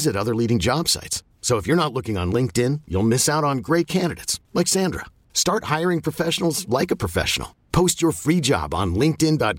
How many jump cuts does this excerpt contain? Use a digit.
0